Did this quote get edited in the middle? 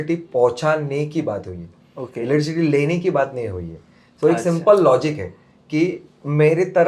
no; 0 cuts

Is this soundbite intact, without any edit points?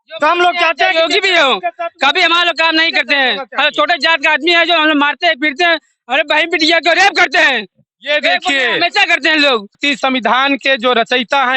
no; 1 cut; at 9.8 s

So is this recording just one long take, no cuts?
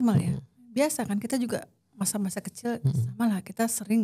yes; 0 cuts

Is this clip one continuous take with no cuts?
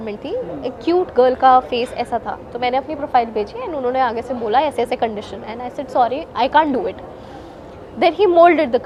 yes; 0 cuts

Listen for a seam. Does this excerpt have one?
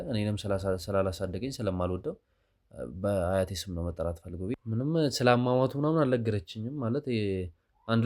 yes; 1 cut; at 4.5 s

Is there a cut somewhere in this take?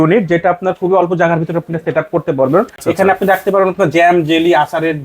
yes; 1 cut; at 2.8 s

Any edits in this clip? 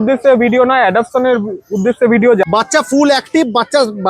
yes; 1 cut; at 2.4 s

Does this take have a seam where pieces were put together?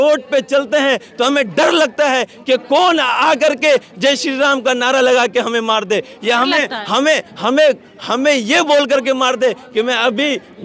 no; 0 cuts

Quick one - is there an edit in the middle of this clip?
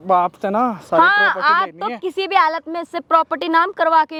no; 0 cuts

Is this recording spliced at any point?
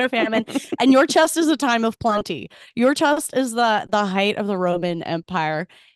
no; 0 cuts

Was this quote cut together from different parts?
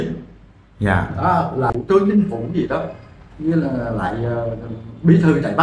yes; 1 cut; at 1.7 s

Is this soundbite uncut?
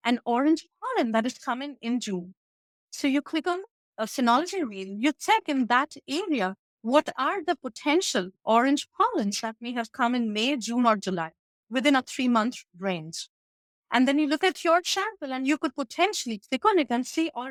yes; 0 cuts

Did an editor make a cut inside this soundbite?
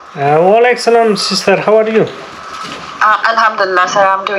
no; 0 cuts

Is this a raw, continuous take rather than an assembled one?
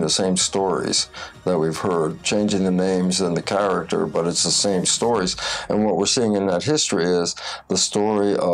yes; 0 cuts

